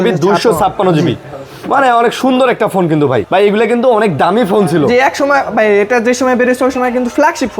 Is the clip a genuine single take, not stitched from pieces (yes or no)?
no